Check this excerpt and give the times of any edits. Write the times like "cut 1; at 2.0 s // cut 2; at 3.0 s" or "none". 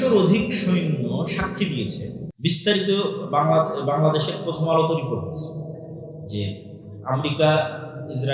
cut 1; at 2.3 s